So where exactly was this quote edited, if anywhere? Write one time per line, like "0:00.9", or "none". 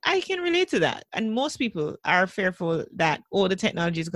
0:01.1